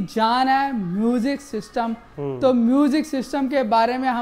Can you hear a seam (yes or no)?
no